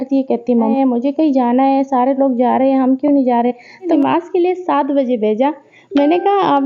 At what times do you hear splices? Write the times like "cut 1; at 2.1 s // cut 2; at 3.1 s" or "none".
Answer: cut 1; at 0.7 s // cut 2; at 3.9 s